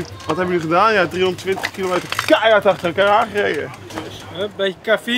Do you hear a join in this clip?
yes; 1 cut; at 4.1 s

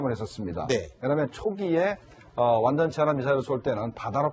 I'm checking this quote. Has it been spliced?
yes; 1 cut; at 2.8 s

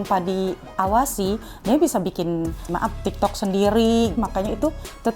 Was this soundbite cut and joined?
yes; 2 cuts; at 2.7 s, 4.2 s

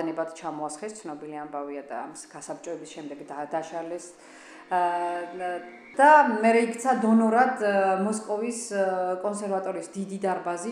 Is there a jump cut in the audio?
yes; 1 cut; at 5.9 s

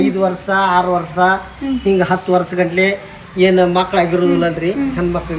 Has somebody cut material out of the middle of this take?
no; 0 cuts

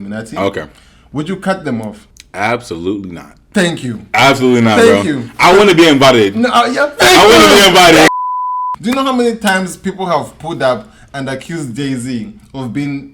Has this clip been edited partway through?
yes; 1 cut; at 8.1 s

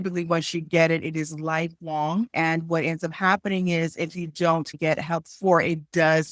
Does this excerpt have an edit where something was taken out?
yes; 2 cuts; at 2.3 s, 4.7 s

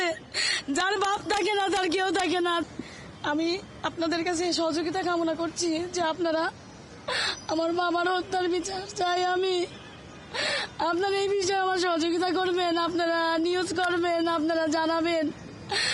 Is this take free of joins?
no; 1 cut; at 2.6 s

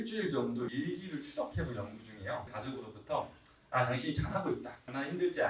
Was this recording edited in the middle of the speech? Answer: yes; 1 cut; at 2.5 s

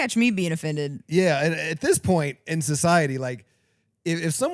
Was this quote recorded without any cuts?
yes; 0 cuts

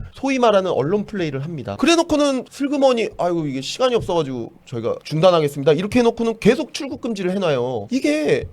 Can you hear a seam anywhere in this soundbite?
yes; 1 cut; at 2.4 s

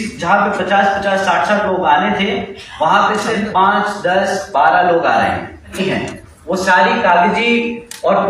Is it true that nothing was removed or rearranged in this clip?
no; 1 cut; at 5.8 s

